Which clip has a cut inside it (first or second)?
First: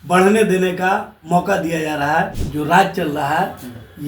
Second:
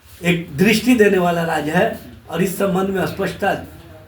first